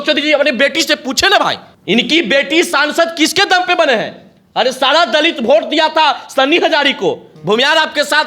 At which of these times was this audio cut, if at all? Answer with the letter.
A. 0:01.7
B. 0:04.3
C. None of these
A